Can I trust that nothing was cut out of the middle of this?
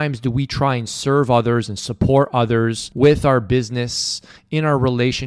no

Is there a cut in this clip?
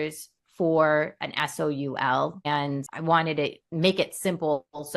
yes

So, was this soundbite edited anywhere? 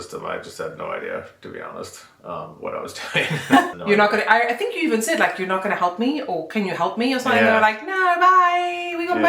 yes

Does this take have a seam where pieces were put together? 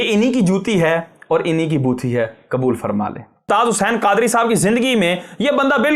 yes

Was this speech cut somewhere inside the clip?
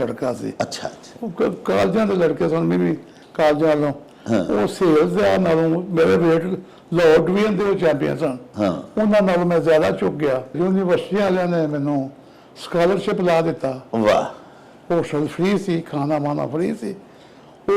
yes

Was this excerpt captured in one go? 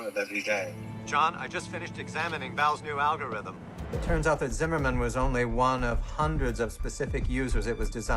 no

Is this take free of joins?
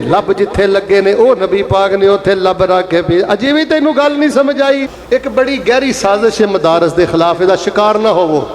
no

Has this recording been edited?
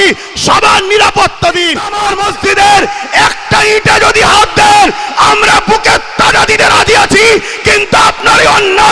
yes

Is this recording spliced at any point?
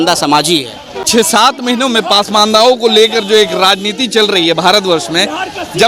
yes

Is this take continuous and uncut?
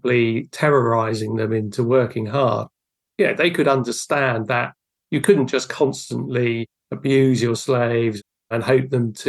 no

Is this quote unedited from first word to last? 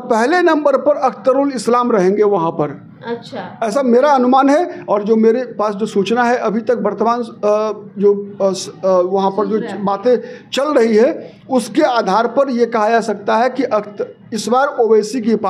yes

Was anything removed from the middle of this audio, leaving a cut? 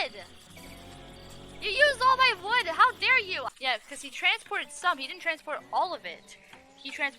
yes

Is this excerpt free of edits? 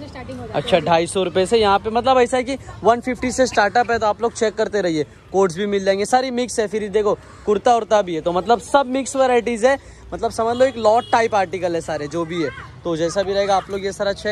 yes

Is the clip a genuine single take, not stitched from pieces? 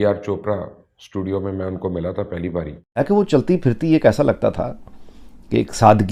no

